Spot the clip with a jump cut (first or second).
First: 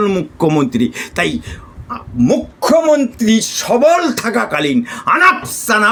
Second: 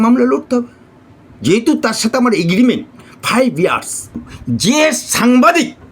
second